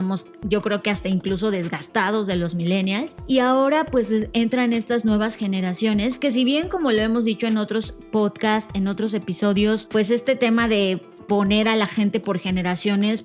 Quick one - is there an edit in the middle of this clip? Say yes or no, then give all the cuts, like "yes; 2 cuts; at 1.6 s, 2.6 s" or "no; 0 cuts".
yes; 2 cuts; at 3.2 s, 9.8 s